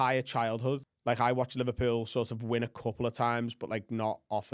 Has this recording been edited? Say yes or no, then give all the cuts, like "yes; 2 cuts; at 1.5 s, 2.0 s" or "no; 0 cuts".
yes; 1 cut; at 0.9 s